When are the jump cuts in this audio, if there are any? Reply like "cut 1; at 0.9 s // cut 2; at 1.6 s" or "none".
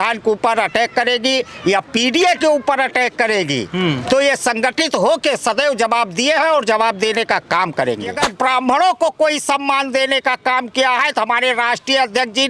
cut 1; at 8.2 s